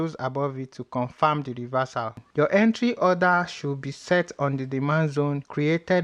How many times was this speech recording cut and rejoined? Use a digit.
1